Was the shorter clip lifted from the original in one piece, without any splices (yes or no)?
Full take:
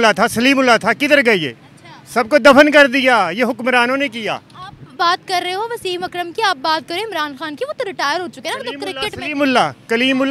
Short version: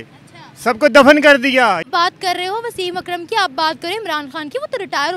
no